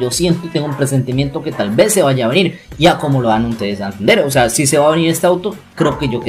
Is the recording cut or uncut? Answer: uncut